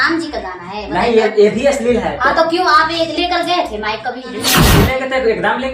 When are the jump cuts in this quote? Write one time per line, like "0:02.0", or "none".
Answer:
0:04.6